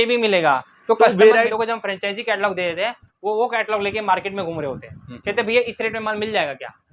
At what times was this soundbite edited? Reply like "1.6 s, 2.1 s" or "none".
1.5 s

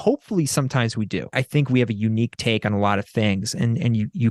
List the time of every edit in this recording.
1.3 s

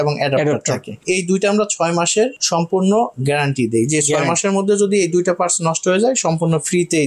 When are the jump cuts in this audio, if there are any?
none

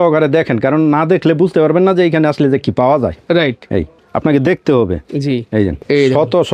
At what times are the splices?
none

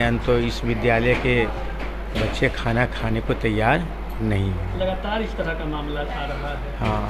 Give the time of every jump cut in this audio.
none

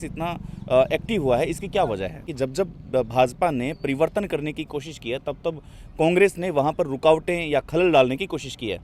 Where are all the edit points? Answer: 2.2 s

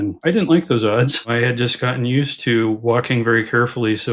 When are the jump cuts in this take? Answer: 1.3 s

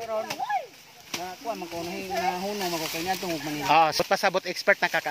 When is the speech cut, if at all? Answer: 4.0 s

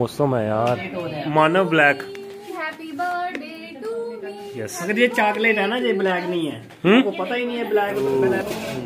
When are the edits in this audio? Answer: 1.0 s, 8.0 s

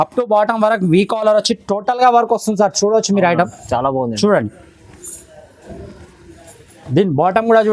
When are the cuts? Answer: none

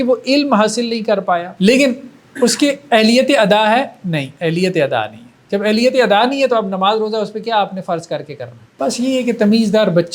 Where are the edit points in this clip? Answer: 1.5 s, 8.6 s

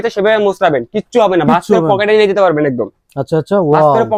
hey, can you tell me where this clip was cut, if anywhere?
none

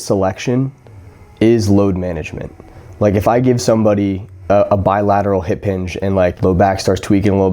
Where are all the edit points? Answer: 4.3 s, 6.4 s

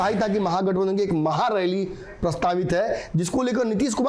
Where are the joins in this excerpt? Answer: none

